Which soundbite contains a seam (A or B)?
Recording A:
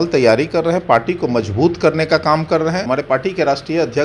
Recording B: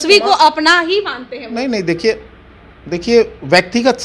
A